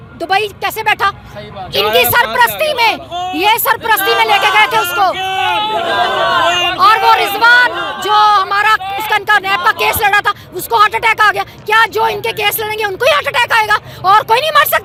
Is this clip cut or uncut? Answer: uncut